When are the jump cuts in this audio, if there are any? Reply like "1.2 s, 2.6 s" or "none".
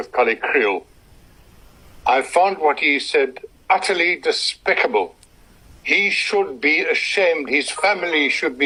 none